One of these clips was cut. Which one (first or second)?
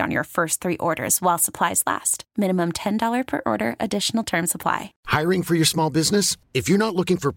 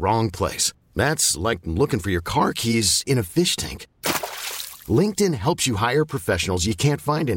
first